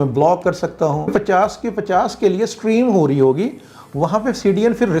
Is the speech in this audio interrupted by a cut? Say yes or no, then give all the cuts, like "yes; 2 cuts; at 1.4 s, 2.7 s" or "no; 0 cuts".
yes; 1 cut; at 1.0 s